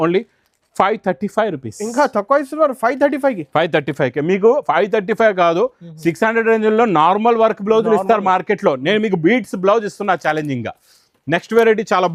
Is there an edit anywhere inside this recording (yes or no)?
no